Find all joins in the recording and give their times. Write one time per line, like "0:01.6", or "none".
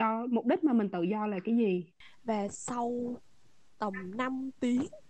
0:02.0